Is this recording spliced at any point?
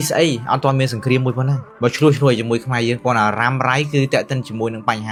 no; 0 cuts

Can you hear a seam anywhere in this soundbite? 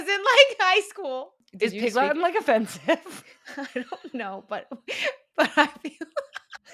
yes; 1 cut; at 1.0 s

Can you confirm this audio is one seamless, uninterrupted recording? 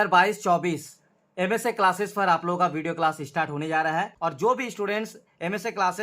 no; 1 cut; at 4.1 s

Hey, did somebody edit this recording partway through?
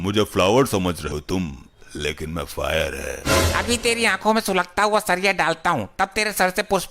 yes; 1 cut; at 1.1 s

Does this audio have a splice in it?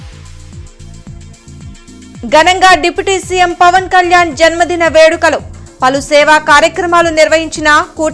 no; 0 cuts

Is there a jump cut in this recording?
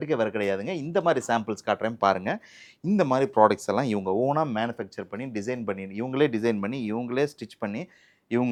no; 0 cuts

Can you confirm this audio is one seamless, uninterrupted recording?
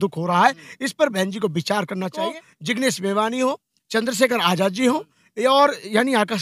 no; 1 cut; at 2.3 s

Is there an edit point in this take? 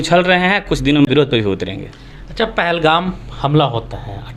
no; 0 cuts

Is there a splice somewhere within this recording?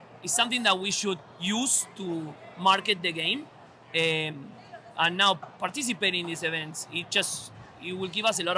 no; 0 cuts

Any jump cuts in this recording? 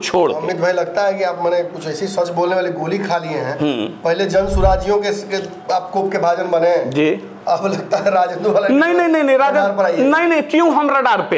no; 0 cuts

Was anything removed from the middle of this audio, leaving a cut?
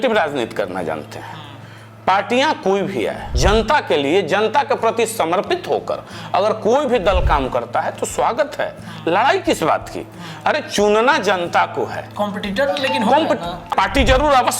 yes; 2 cuts; at 3.3 s, 13.7 s

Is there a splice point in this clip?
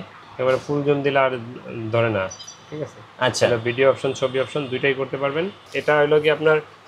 yes; 1 cut; at 5.6 s

